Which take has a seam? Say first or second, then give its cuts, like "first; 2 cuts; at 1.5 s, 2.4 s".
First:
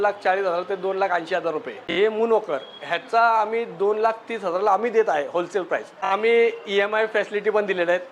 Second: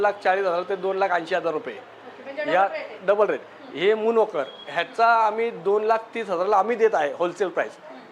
first; 2 cuts; at 1.8 s, 6.0 s